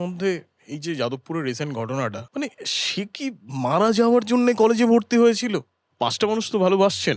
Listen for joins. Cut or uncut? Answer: cut